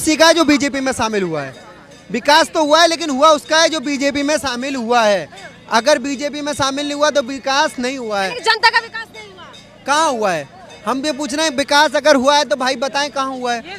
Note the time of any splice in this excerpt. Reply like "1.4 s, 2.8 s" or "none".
none

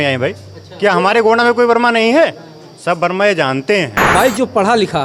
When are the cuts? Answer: 4.0 s

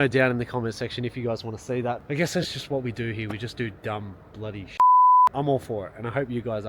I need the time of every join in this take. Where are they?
2.0 s, 5.3 s

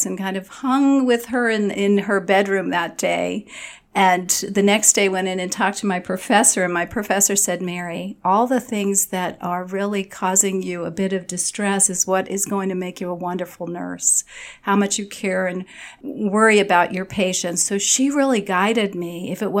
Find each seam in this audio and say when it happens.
1.7 s, 16.0 s

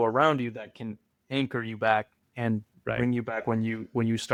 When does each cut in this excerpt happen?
none

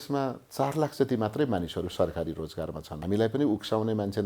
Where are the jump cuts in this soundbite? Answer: 2.9 s

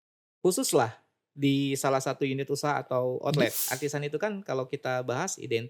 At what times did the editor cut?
3.6 s

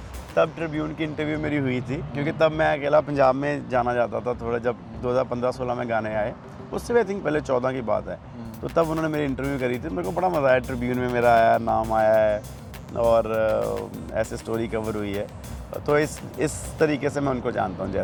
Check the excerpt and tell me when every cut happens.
none

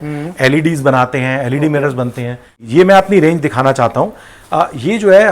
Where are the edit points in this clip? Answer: 2.7 s

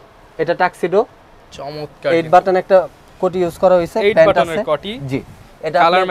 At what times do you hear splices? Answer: none

